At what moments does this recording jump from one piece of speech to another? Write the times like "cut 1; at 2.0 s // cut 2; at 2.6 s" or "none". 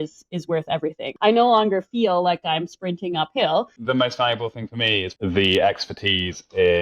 cut 1; at 1.1 s // cut 2; at 3.8 s // cut 3; at 5.1 s